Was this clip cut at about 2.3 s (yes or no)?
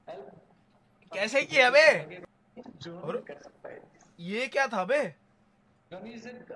yes